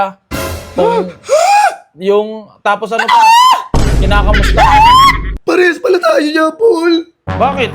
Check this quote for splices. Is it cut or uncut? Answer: cut